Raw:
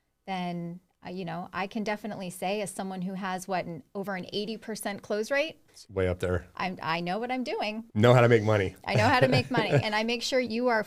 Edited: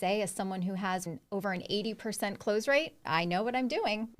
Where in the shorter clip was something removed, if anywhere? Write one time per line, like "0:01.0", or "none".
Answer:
0:01.0
0:03.0